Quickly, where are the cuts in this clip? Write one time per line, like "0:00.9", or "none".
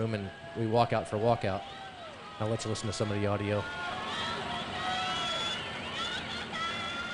none